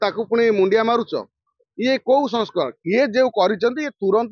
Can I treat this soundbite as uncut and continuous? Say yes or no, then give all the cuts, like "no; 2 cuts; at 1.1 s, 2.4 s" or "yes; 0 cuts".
no; 1 cut; at 2.8 s